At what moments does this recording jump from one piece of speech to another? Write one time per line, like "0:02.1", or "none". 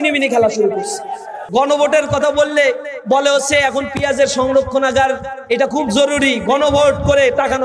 0:01.3

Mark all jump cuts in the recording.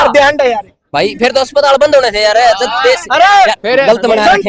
none

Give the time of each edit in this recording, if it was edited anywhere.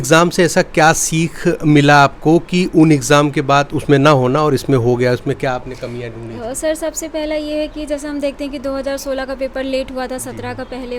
none

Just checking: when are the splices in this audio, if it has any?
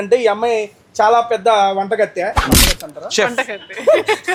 none

